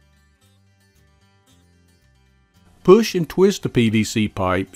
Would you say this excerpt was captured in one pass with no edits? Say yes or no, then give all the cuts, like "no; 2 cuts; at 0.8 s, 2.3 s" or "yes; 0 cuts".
no; 1 cut; at 2.8 s